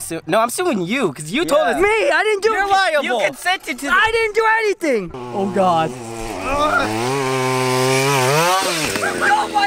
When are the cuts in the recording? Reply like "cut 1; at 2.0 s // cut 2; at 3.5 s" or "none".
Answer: cut 1; at 5.2 s